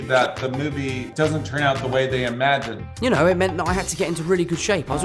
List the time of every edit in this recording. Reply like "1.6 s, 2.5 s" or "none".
1.0 s, 2.8 s